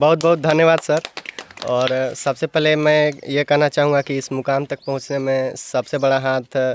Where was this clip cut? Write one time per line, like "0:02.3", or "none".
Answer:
none